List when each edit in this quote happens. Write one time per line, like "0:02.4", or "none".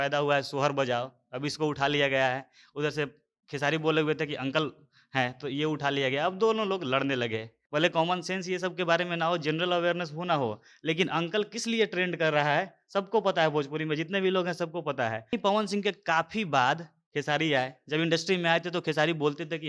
0:07.5
0:15.4